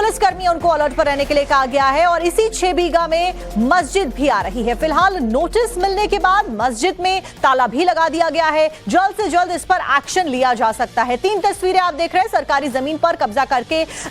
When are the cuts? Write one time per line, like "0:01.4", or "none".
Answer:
0:12.3